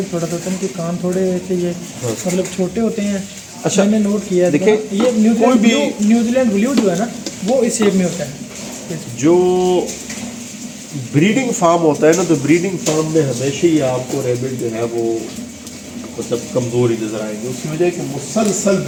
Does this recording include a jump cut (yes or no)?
no